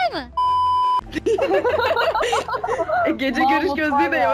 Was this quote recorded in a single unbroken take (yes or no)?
yes